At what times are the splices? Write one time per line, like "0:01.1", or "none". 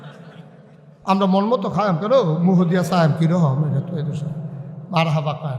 none